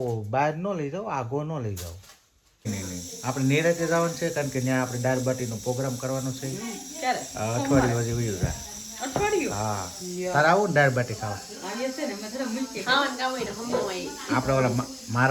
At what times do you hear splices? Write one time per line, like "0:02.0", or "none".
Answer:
0:02.7

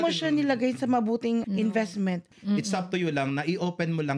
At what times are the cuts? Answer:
0:01.5
0:02.3

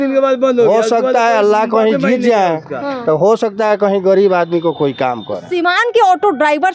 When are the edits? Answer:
0:05.5

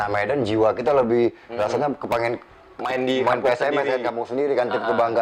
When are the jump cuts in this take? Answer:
none

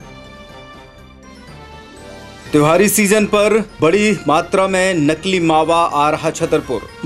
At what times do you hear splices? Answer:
0:02.4

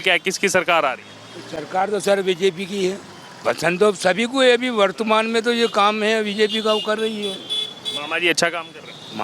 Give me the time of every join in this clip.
0:03.3

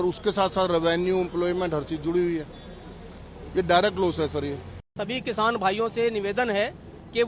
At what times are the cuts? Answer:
0:04.9

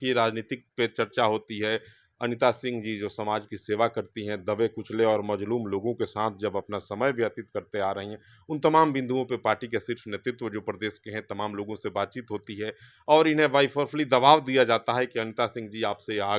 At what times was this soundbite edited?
none

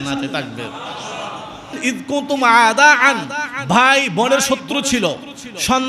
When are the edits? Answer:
0:01.8

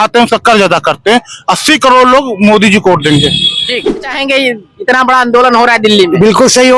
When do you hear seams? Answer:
0:04.1

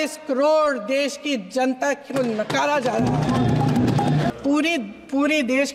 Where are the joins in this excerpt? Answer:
0:04.3

